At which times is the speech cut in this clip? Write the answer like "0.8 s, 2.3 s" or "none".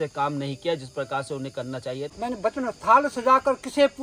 2.1 s